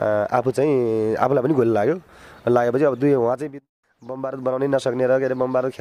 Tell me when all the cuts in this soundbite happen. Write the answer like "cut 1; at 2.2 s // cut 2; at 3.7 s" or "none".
cut 1; at 3.5 s